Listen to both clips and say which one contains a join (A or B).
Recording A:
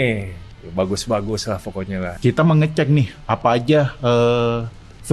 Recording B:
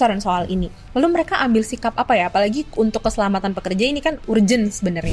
A